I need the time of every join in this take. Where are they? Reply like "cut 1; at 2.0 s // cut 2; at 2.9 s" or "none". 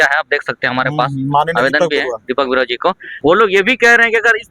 cut 1; at 3.1 s